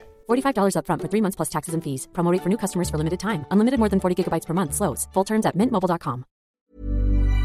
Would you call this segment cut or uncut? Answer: cut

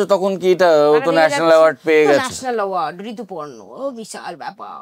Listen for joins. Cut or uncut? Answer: uncut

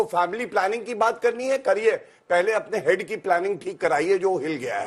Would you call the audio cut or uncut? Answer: uncut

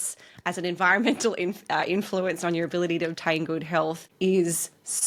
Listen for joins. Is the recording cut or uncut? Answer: uncut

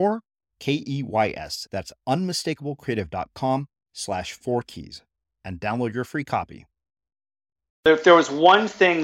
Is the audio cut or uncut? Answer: cut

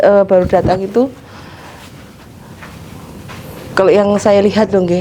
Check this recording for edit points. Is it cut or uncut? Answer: uncut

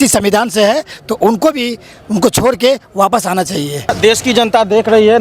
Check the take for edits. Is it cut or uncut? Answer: cut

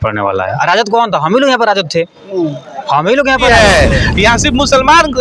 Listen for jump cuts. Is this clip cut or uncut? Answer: cut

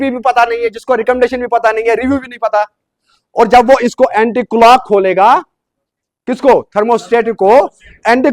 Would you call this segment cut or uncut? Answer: uncut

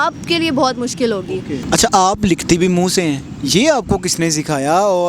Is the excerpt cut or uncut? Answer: cut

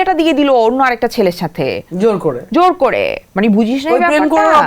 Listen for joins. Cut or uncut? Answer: uncut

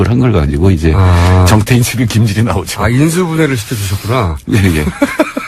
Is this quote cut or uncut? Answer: cut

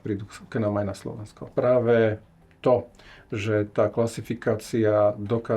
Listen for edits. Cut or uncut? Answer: cut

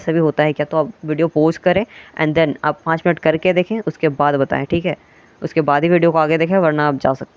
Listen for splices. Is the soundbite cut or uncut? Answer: uncut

